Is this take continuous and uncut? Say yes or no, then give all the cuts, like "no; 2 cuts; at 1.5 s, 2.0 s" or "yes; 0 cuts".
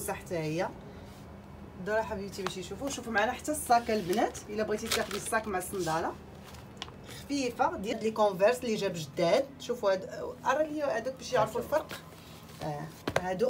no; 1 cut; at 7.9 s